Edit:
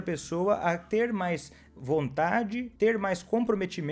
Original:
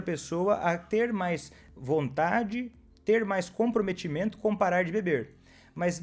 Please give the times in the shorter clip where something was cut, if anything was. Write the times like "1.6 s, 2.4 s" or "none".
2.7 s